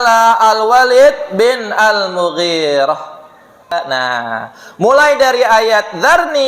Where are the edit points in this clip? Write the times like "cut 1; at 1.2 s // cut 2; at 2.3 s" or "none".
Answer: cut 1; at 3.7 s